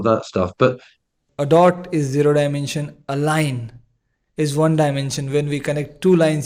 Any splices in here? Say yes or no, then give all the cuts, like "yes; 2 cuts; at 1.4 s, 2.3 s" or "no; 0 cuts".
yes; 1 cut; at 1.2 s